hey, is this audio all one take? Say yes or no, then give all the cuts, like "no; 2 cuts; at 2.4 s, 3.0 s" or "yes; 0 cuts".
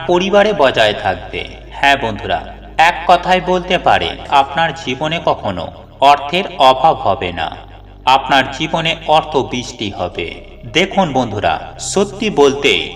no; 1 cut; at 4.3 s